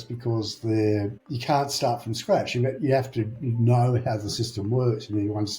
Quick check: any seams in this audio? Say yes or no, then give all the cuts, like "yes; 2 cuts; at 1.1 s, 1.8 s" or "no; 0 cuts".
yes; 1 cut; at 1.3 s